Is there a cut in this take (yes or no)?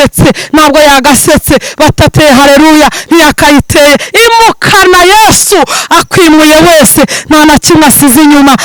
no